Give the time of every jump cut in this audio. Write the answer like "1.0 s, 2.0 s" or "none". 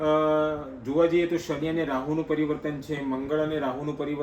none